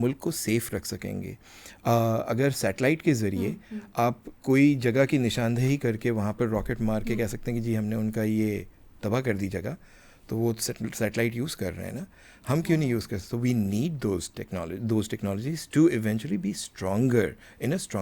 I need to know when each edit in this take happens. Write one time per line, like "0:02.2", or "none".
none